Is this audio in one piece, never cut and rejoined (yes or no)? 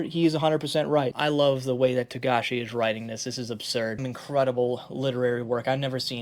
no